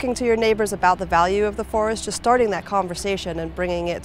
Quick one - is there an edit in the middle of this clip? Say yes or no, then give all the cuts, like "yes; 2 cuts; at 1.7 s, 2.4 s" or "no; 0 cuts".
no; 0 cuts